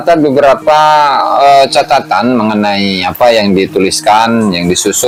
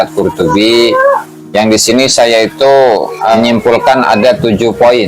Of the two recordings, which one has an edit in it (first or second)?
second